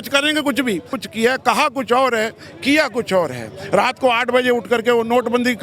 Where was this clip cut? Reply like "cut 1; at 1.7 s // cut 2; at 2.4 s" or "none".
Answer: cut 1; at 1.0 s

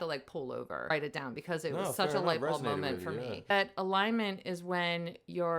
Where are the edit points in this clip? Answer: cut 1; at 0.9 s // cut 2; at 3.5 s

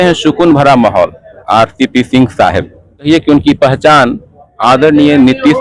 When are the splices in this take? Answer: cut 1; at 1.3 s // cut 2; at 3.1 s

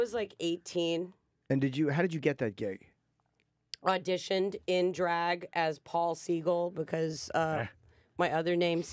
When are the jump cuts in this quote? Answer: cut 1; at 2.9 s

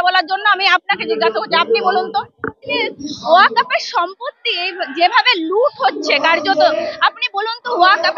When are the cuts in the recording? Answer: cut 1; at 2.9 s

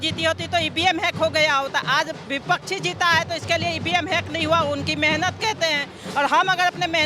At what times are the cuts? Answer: none

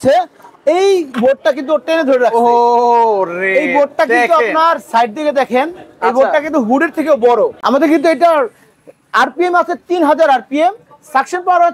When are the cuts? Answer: cut 1; at 7.6 s

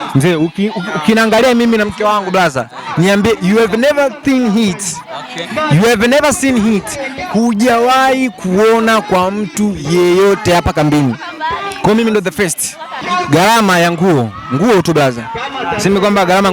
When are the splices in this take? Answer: cut 1; at 12.9 s

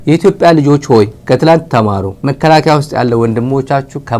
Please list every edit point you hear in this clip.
cut 1; at 1.2 s // cut 2; at 2.1 s

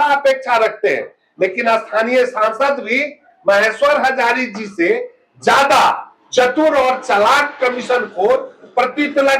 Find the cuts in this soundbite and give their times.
none

